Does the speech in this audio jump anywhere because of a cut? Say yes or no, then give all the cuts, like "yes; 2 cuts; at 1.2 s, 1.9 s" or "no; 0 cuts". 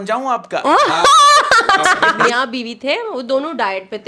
yes; 1 cut; at 2.2 s